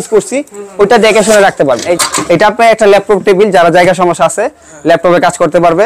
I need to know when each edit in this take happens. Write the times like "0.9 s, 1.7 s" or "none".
1.9 s